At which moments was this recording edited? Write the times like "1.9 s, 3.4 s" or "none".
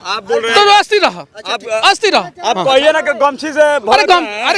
none